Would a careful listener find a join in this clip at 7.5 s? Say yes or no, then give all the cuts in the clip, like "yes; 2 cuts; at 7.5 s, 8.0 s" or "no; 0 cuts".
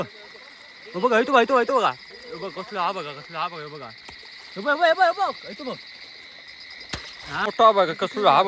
yes; 1 cut; at 7.5 s